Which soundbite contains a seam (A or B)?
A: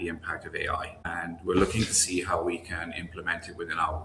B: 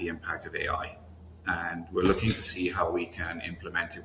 A